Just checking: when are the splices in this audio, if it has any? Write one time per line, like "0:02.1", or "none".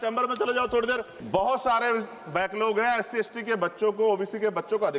0:01.1